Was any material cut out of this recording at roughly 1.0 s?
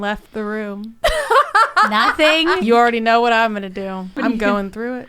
no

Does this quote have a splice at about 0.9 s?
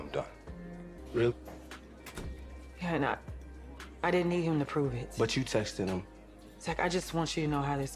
yes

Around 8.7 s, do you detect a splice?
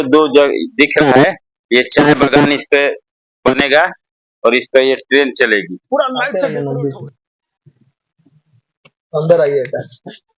no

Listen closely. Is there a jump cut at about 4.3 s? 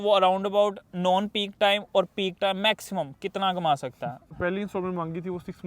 yes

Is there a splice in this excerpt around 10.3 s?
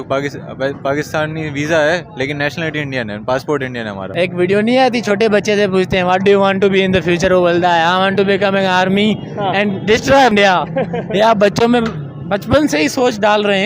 yes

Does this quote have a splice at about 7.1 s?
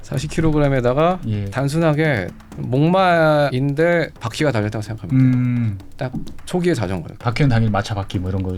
yes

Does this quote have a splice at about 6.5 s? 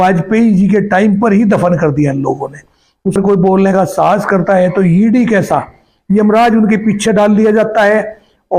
no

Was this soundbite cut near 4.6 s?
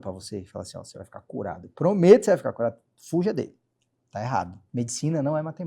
yes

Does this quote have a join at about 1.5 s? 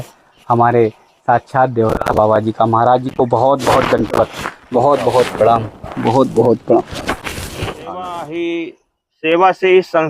no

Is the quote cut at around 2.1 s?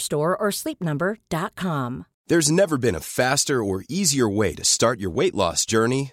yes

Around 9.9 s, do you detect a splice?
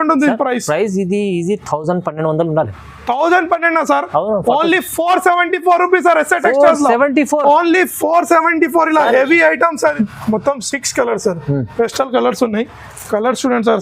yes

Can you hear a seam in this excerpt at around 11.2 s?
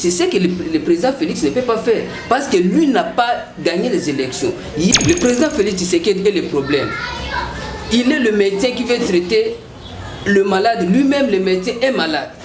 no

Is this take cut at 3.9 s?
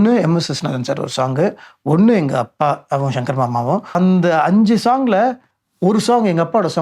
yes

